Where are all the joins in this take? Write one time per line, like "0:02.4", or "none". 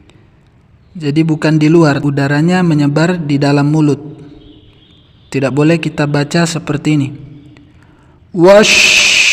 0:02.0